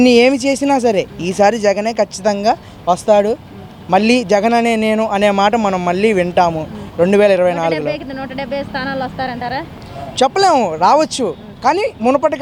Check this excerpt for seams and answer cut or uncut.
uncut